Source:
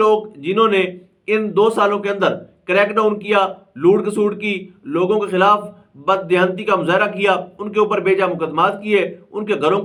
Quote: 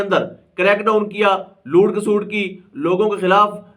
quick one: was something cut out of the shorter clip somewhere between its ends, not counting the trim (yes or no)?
no